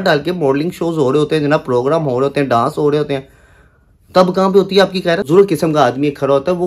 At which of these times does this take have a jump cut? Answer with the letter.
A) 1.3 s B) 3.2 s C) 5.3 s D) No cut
C